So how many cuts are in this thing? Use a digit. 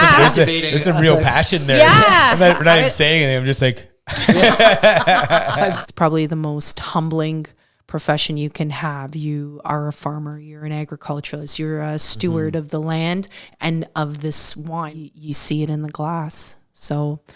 2